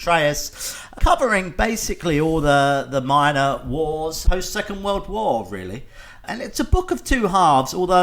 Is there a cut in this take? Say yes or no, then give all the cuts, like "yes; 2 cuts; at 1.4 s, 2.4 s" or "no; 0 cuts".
yes; 3 cuts; at 0.9 s, 4.2 s, 6.2 s